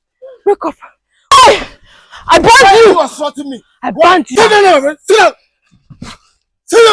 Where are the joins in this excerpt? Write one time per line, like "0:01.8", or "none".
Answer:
0:04.3